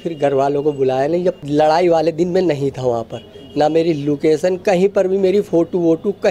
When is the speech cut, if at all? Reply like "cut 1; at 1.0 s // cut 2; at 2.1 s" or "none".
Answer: cut 1; at 1.4 s